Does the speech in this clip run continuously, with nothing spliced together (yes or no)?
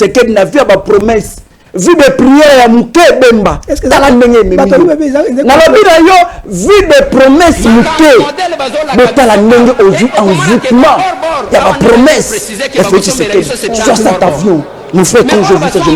yes